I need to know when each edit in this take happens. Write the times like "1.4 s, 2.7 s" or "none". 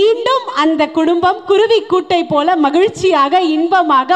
none